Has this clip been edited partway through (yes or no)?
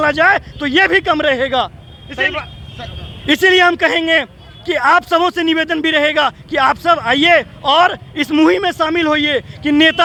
no